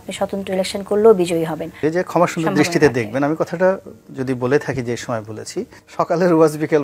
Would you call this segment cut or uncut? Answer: cut